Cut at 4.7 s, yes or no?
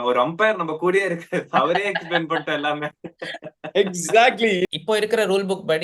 yes